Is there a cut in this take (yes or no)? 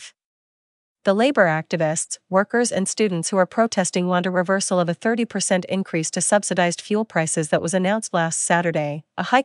no